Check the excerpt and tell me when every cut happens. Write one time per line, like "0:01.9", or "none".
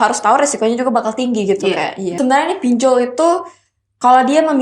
0:02.1